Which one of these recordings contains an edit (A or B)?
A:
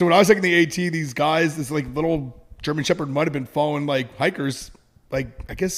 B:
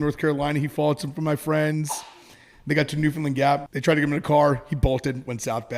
B